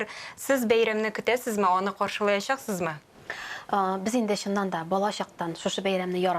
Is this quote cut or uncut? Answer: uncut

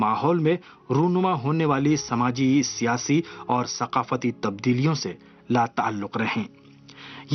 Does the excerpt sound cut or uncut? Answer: cut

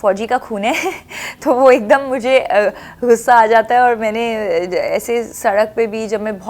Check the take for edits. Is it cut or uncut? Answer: uncut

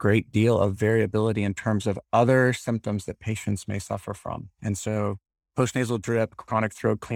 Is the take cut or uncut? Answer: cut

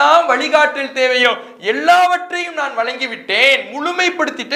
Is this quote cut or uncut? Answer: uncut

